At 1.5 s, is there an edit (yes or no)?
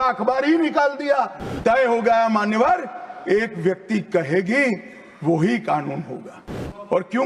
yes